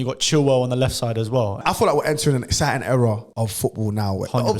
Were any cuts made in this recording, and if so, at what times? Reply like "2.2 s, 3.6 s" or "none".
1.6 s, 3.3 s